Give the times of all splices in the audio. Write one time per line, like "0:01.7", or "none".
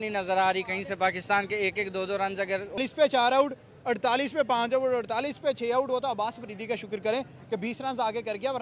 0:02.8